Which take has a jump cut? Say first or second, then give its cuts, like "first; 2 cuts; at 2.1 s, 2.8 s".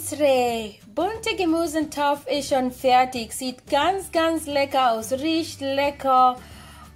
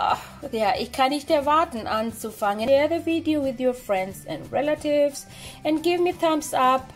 second; 1 cut; at 2.6 s